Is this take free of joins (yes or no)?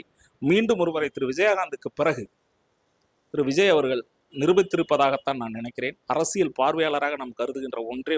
yes